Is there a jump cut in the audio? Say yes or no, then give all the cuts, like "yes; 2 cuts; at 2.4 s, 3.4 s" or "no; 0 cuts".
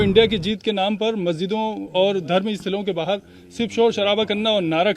no; 0 cuts